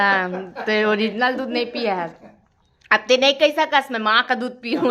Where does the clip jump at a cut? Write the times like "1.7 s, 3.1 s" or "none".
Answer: none